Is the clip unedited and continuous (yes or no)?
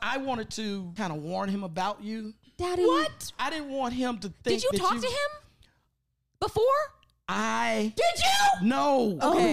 no